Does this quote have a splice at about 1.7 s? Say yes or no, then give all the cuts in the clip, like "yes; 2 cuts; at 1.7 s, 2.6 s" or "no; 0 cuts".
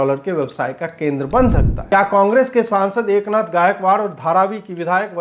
yes; 1 cut; at 1.7 s